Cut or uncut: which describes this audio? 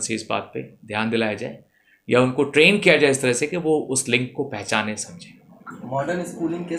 uncut